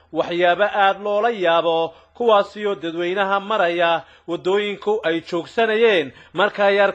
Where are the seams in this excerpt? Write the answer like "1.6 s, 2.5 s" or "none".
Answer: none